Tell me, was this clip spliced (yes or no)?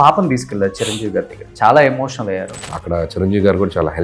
yes